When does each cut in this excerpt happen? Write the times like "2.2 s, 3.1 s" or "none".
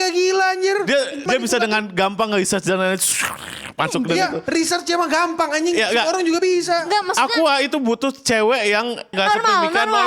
1.2 s, 9.1 s